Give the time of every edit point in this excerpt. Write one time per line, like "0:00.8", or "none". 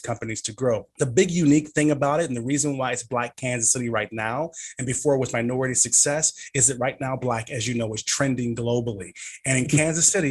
none